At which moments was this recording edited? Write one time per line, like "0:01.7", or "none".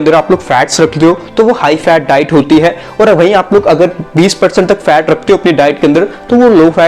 none